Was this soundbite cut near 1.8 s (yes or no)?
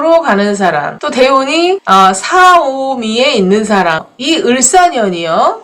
yes